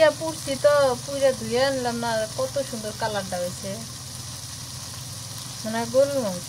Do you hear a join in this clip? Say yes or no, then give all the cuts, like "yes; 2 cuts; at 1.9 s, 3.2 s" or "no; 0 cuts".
no; 0 cuts